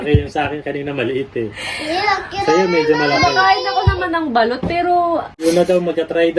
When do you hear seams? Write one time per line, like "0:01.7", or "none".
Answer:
0:05.4